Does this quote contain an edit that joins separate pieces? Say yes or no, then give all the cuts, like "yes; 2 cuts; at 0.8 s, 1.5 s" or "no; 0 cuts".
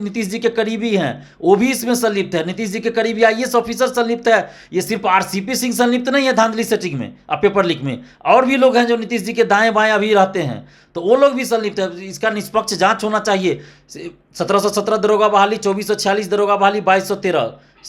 no; 0 cuts